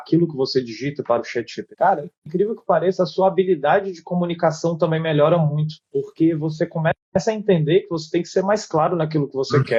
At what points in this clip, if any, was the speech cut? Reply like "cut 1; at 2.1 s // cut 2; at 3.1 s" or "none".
none